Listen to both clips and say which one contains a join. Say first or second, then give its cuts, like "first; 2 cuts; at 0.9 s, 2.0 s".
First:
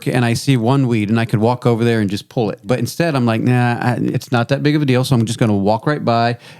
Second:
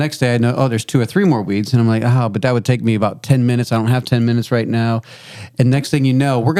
first; 2 cuts; at 2.7 s, 4.2 s